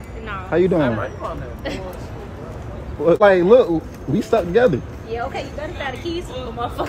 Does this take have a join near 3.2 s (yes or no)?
yes